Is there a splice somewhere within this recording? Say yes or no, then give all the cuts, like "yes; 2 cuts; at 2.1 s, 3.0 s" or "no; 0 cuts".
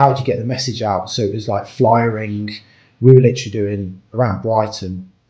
no; 0 cuts